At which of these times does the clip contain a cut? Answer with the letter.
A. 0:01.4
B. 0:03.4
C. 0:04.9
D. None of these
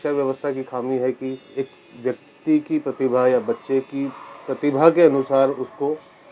A